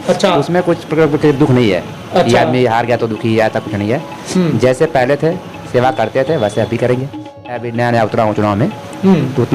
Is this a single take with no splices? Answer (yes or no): no